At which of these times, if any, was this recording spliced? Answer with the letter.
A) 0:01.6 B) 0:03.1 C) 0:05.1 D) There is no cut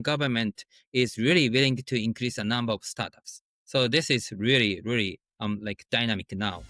D